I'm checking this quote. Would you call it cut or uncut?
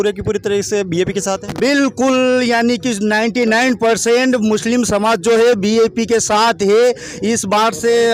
uncut